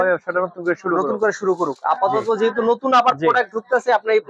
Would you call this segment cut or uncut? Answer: uncut